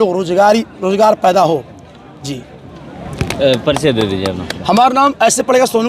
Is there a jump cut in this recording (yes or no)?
no